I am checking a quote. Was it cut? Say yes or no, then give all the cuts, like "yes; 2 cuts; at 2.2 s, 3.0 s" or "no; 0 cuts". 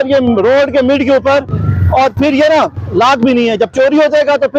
no; 0 cuts